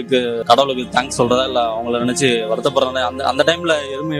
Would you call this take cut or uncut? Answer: uncut